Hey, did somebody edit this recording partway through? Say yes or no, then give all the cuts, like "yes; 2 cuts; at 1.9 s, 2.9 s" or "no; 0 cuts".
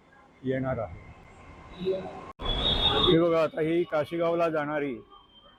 no; 0 cuts